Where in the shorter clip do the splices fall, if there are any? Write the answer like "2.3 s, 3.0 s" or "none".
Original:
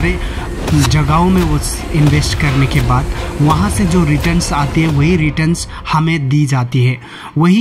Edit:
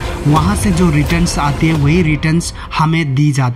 none